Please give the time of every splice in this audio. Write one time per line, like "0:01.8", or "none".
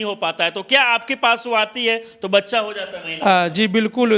none